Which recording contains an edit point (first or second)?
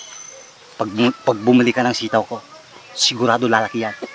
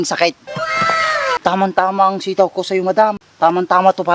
second